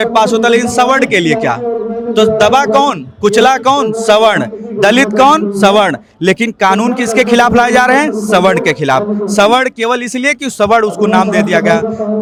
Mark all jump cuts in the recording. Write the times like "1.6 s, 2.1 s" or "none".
none

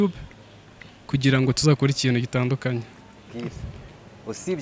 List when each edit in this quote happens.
3.3 s

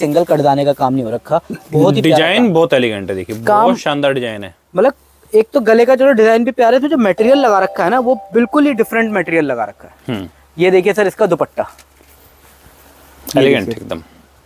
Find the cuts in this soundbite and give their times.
none

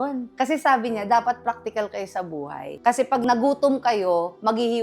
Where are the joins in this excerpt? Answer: 3.2 s

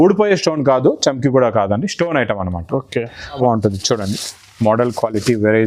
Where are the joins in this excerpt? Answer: 3.3 s

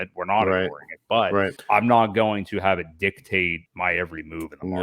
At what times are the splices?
1.6 s, 3.6 s

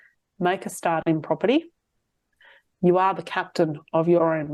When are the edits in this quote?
none

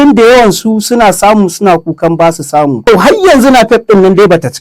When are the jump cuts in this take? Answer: 2.8 s

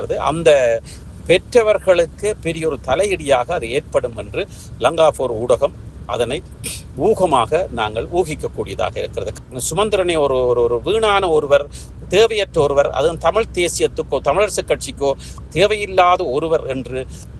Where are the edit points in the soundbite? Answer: 9.3 s

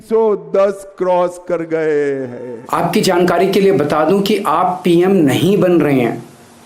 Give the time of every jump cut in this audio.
2.5 s

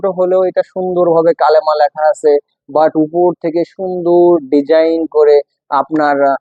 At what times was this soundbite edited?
none

